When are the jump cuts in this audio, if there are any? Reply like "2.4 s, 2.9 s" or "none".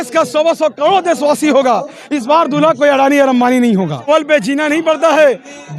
4.1 s